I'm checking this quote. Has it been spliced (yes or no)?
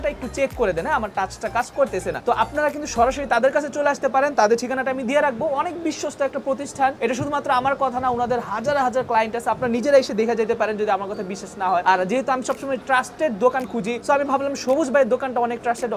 no